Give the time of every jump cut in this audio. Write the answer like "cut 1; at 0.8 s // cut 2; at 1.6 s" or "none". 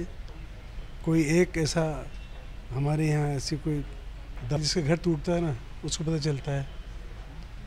cut 1; at 4.6 s

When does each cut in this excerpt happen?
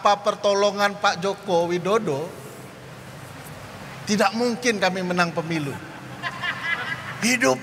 none

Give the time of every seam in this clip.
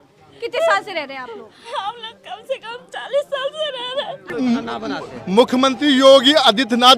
cut 1; at 4.3 s

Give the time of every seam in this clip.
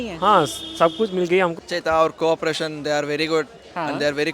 cut 1; at 1.6 s

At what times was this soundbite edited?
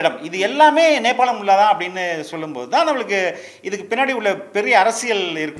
none

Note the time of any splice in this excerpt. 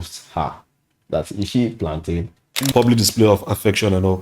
cut 1; at 2.7 s

